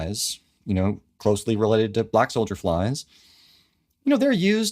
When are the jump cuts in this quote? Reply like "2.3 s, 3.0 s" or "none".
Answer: 1.1 s